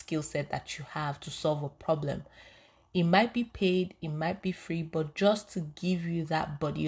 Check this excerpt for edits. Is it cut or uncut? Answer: uncut